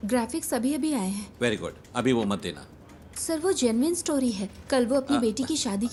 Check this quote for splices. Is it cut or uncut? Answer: uncut